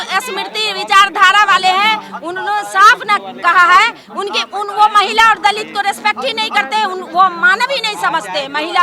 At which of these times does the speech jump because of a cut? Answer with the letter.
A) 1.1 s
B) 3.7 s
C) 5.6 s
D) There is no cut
D